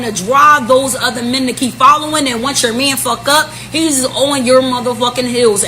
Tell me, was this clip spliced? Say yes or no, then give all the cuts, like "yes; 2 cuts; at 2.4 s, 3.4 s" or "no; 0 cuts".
yes; 1 cut; at 3.0 s